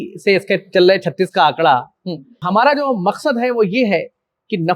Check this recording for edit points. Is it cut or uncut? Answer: cut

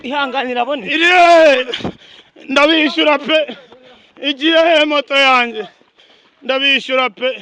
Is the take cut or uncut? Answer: uncut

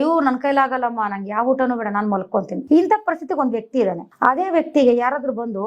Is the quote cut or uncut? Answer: cut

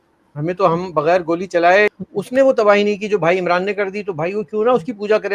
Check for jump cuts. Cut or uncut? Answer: uncut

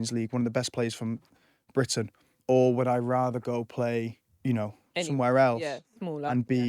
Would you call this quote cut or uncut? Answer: cut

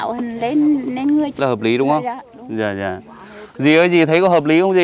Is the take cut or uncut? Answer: cut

